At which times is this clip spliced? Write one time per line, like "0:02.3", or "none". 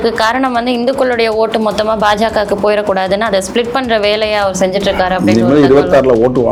none